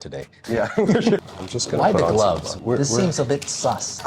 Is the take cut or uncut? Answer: cut